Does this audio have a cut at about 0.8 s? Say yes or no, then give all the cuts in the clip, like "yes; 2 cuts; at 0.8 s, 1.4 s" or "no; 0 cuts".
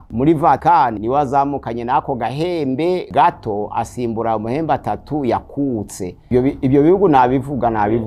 yes; 3 cuts; at 0.8 s, 3.1 s, 6.2 s